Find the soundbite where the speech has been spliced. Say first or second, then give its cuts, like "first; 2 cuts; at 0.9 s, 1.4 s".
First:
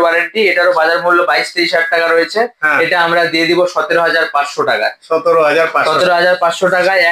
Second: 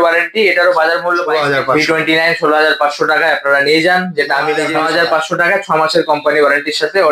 second; 2 cuts; at 1.2 s, 4.6 s